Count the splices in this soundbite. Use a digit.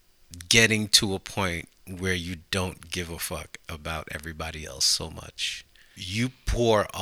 1